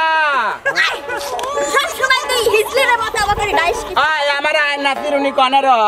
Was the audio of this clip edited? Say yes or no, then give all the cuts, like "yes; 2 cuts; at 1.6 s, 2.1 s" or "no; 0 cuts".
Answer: no; 0 cuts